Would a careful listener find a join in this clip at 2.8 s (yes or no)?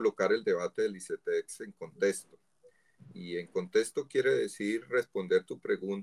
no